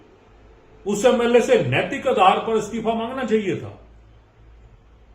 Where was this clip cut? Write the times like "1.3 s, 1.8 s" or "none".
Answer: none